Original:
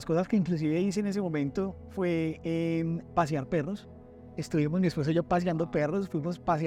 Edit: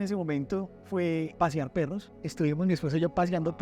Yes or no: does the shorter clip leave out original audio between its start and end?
yes